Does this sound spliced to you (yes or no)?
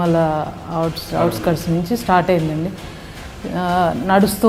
no